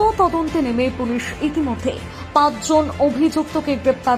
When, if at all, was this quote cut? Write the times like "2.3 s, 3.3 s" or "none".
none